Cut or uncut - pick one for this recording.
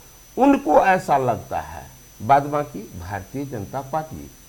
uncut